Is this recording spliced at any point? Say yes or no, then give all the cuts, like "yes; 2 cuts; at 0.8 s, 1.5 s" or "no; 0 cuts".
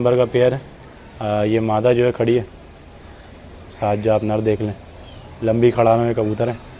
no; 0 cuts